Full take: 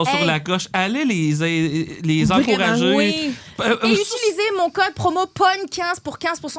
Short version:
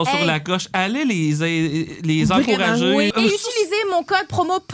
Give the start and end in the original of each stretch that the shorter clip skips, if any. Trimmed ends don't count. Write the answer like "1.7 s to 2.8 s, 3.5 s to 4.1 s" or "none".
3.1 s to 3.8 s